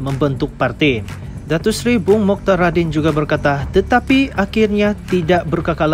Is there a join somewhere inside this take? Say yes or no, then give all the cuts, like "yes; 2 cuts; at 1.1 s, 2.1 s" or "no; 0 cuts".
no; 0 cuts